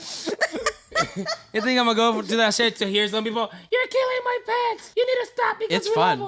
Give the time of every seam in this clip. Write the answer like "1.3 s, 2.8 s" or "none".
4.8 s